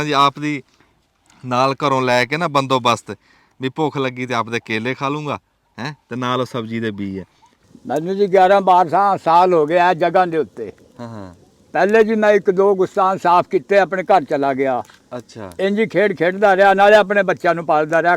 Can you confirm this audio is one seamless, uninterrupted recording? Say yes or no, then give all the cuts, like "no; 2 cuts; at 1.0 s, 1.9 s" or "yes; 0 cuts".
no; 1 cut; at 7.5 s